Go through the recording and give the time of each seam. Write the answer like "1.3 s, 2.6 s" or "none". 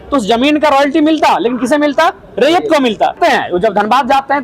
3.2 s